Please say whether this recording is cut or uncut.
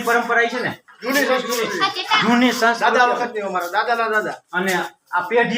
uncut